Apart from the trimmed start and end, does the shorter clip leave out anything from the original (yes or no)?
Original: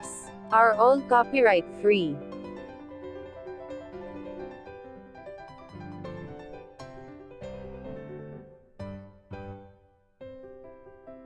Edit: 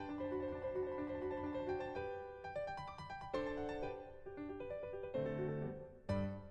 no